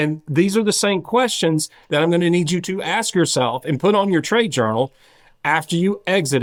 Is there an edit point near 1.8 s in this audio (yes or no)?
no